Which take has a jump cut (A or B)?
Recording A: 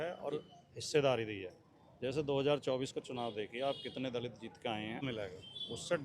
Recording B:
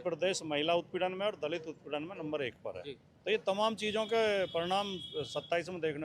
A